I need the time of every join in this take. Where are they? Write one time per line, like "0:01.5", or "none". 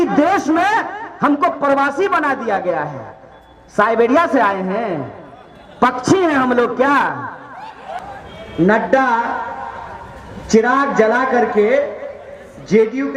0:07.9